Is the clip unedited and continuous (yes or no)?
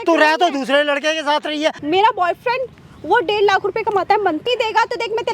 no